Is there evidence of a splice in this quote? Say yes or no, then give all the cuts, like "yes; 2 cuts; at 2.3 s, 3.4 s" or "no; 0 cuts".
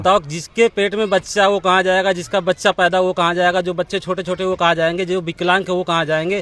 no; 0 cuts